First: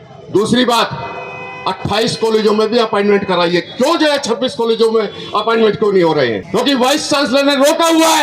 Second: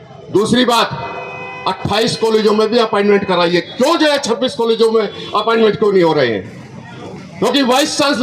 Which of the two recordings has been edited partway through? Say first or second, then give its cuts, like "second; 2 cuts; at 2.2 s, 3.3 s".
first; 1 cut; at 6.4 s